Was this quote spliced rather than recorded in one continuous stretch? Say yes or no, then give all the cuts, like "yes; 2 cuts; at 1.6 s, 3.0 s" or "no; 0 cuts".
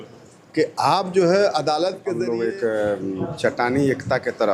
yes; 1 cut; at 2.1 s